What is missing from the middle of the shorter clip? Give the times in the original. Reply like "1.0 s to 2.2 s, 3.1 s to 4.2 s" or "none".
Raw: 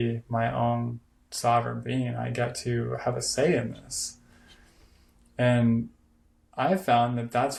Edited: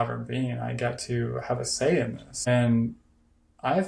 3.8 s to 5.2 s

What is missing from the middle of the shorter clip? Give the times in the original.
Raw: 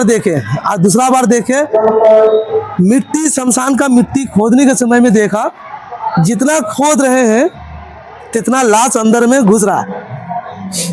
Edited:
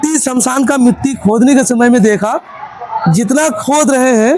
none

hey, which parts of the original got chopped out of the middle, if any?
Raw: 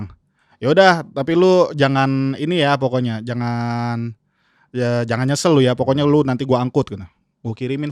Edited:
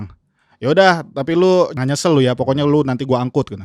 1.7 s to 5.1 s

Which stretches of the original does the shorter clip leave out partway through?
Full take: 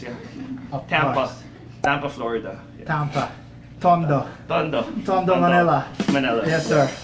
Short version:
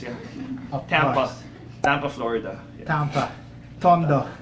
none

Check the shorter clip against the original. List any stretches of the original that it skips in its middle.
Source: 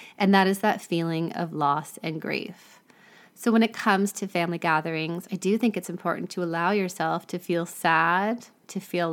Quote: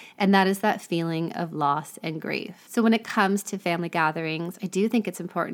2.6 s to 3.3 s

